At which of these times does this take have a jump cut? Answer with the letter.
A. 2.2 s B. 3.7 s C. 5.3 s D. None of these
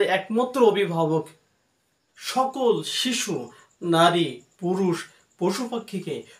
A